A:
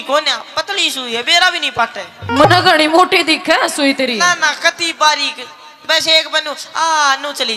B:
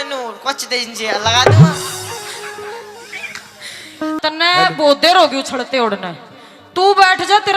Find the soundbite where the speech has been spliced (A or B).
B